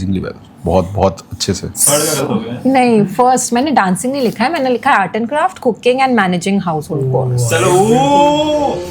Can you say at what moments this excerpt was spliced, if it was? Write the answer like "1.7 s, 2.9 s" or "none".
1.7 s